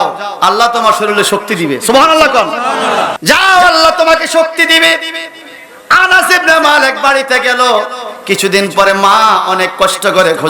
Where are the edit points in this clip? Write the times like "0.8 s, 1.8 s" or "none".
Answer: 3.1 s